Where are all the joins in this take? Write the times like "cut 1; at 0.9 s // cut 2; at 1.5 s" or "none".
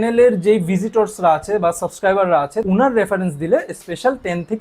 cut 1; at 2.6 s